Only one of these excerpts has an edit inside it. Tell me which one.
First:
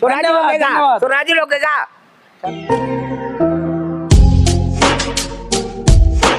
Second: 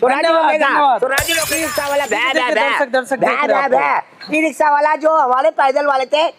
second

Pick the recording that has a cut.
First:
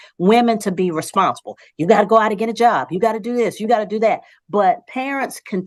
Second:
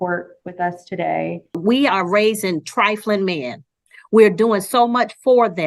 second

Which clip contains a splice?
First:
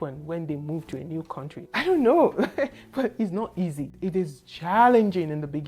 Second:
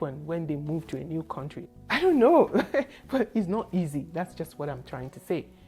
first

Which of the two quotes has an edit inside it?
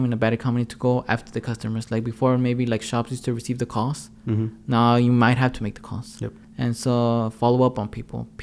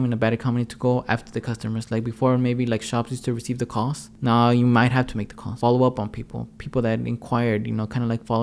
second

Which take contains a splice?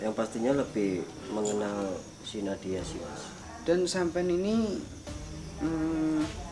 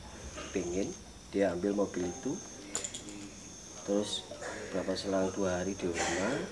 first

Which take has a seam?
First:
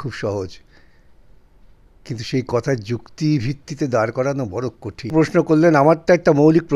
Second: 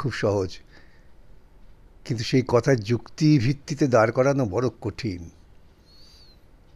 first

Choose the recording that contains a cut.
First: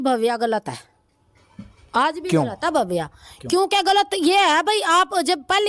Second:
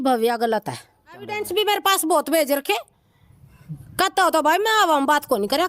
second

